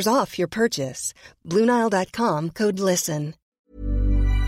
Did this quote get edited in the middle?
yes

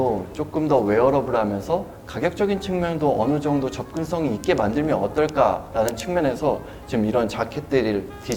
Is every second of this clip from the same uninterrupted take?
yes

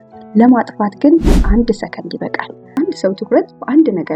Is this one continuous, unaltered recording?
no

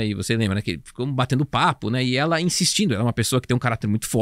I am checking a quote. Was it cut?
no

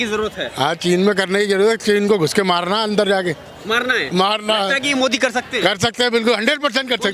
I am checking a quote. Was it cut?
no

